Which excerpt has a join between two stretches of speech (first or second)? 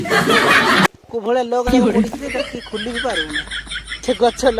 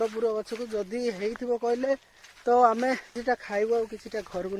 first